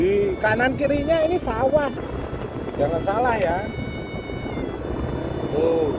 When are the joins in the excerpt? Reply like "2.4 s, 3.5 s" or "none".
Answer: 1.9 s